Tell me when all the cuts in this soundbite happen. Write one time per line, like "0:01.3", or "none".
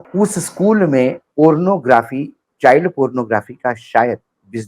0:01.2